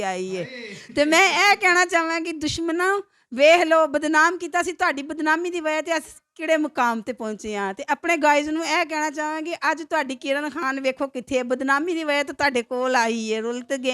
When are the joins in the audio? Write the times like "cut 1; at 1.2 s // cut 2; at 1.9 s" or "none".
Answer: none